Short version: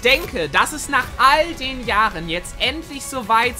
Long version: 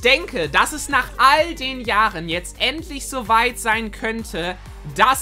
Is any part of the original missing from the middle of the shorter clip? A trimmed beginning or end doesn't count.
no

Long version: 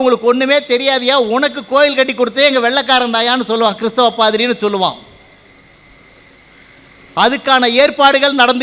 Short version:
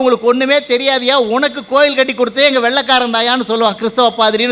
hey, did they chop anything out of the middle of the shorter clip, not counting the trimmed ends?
no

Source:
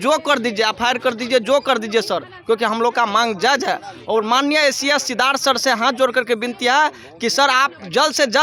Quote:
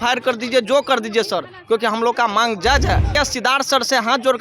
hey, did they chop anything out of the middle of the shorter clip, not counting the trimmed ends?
yes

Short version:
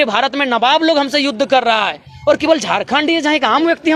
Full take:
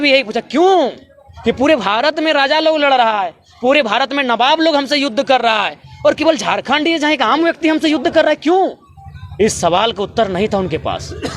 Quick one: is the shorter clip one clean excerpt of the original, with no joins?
yes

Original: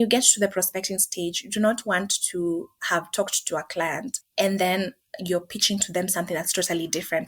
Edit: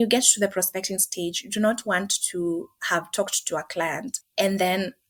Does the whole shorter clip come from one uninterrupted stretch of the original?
yes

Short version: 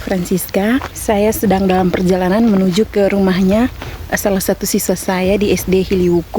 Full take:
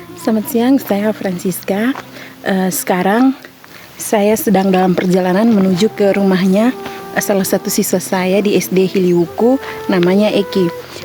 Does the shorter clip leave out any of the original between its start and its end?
yes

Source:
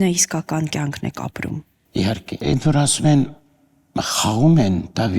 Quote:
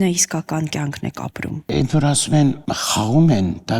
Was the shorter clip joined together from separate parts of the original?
yes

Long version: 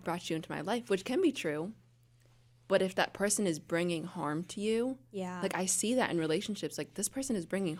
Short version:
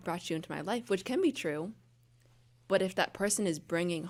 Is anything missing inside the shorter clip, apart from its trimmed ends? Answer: no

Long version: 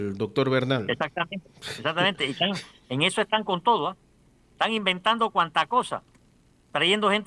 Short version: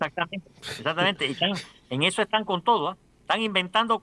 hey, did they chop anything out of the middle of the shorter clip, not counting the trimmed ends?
yes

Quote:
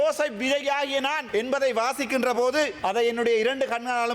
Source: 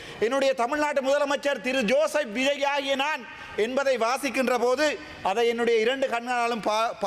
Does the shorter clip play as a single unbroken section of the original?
no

